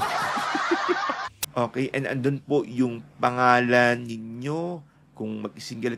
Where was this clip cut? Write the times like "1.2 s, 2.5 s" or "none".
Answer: 1.3 s